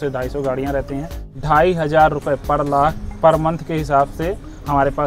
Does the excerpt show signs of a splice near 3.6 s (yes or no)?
no